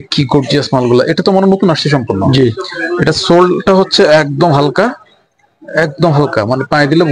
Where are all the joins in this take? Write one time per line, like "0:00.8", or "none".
none